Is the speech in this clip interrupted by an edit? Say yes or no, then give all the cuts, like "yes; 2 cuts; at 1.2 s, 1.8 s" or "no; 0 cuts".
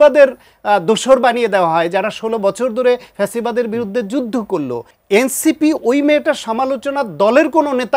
yes; 1 cut; at 4.9 s